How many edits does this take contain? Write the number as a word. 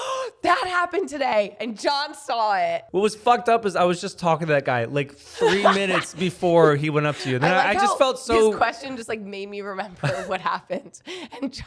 one